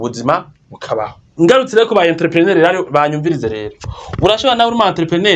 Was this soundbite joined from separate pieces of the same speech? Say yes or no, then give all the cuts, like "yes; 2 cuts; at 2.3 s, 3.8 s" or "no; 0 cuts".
yes; 1 cut; at 1.2 s